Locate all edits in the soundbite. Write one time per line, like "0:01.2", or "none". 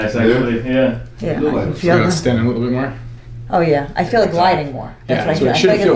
none